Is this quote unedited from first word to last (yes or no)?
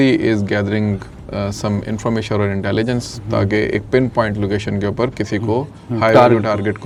yes